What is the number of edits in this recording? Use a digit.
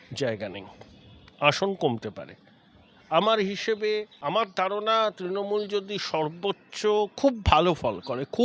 1